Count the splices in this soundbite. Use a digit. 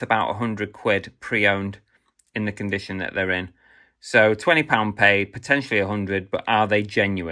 0